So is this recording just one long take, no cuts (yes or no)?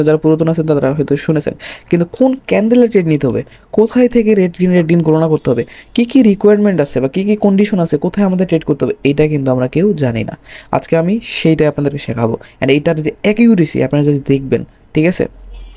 yes